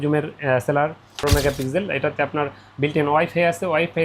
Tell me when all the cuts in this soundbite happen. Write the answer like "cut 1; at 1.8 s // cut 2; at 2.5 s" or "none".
cut 1; at 1.2 s